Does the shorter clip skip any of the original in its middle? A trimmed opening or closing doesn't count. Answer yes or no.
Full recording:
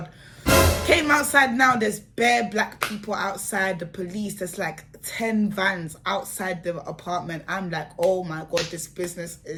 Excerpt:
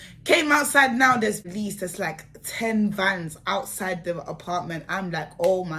yes